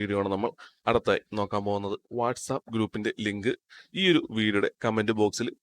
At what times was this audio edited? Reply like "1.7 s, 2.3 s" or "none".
2.0 s